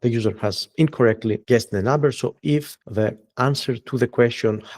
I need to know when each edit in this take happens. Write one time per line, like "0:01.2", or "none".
0:01.4
0:02.8